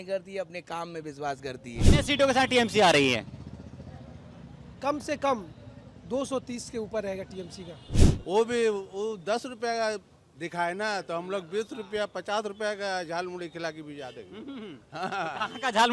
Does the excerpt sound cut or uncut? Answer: cut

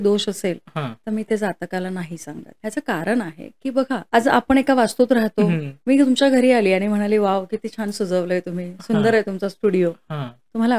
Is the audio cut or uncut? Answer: cut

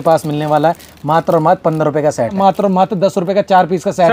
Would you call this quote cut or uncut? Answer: cut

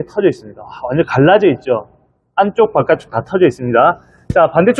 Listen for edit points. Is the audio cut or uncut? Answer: uncut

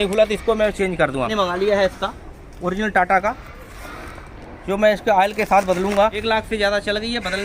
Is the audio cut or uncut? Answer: cut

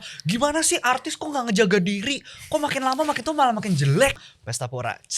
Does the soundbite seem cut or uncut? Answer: cut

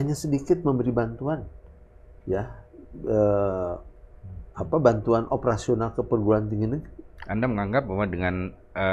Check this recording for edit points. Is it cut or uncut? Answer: uncut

